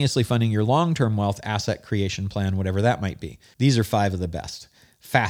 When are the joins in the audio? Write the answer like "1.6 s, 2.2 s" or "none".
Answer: 3.4 s